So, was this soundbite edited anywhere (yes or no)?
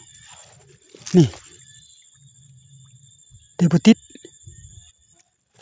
no